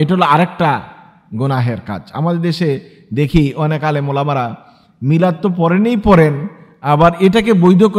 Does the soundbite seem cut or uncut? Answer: uncut